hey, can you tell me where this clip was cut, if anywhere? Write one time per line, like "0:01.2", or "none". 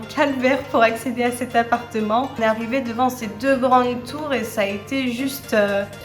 0:02.4